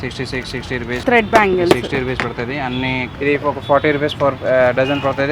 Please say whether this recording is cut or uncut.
cut